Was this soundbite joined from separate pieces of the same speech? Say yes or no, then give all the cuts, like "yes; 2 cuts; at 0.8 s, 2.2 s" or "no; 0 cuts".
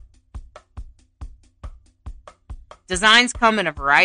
yes; 1 cut; at 2.4 s